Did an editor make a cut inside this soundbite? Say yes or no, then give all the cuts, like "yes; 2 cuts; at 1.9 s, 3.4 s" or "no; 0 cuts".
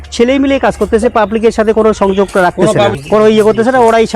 yes; 1 cut; at 3.0 s